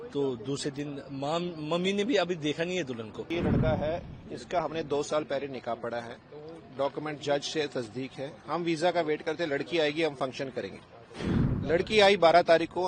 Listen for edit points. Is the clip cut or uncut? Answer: cut